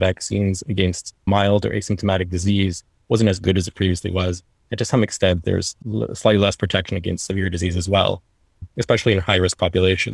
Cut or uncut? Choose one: cut